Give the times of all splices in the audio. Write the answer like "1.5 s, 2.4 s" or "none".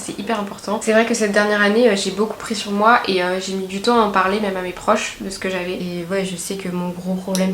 0.8 s, 5.8 s